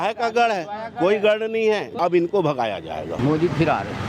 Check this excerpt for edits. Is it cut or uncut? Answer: cut